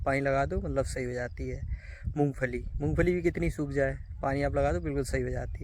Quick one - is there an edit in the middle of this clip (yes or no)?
no